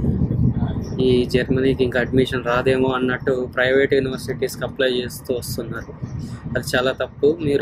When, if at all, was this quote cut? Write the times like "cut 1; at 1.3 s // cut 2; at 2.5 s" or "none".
none